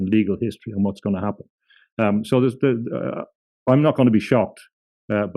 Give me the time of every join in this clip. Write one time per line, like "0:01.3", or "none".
none